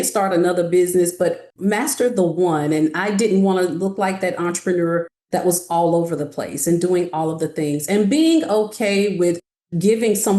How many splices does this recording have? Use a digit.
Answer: 1